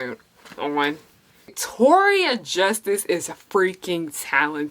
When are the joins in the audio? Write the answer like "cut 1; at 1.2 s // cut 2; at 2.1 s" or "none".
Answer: cut 1; at 1.5 s